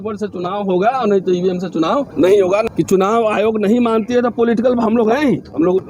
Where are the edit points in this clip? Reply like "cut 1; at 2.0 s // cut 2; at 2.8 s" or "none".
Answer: cut 1; at 2.1 s // cut 2; at 2.7 s